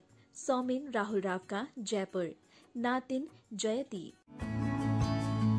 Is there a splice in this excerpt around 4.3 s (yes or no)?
yes